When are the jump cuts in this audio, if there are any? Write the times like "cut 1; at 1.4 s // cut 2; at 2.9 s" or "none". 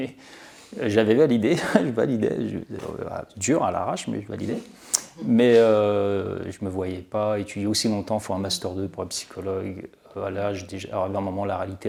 none